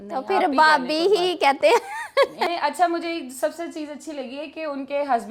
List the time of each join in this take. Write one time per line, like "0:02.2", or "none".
0:02.5